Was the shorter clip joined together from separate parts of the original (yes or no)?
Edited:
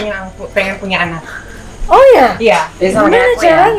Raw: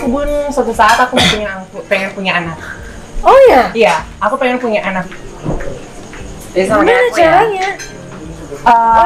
yes